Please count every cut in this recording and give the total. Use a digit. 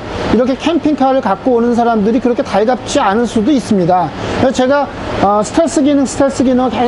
0